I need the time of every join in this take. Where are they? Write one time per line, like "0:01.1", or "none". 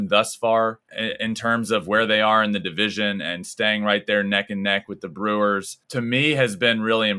0:00.9
0:05.8

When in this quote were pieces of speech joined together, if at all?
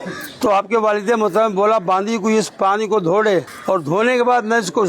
0:03.5

